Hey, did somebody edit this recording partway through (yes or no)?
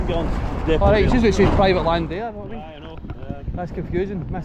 no